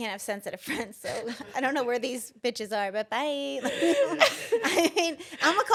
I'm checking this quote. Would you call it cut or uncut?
uncut